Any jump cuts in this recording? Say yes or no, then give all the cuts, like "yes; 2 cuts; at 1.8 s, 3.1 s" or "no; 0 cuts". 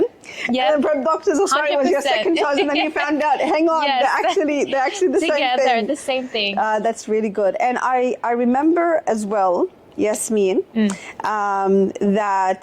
no; 0 cuts